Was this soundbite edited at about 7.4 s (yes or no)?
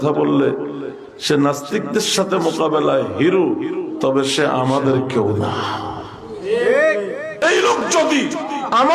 yes